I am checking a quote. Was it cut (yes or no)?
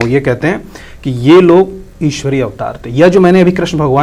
no